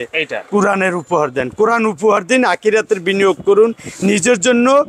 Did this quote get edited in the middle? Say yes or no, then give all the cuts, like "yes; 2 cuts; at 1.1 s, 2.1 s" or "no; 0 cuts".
no; 0 cuts